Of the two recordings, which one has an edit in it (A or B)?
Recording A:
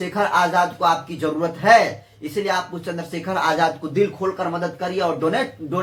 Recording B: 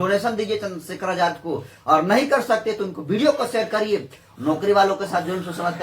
B